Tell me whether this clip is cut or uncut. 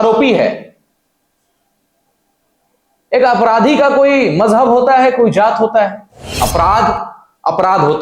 cut